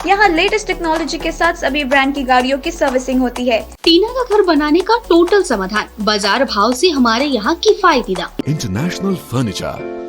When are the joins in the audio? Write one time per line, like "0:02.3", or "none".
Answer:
0:03.7
0:08.4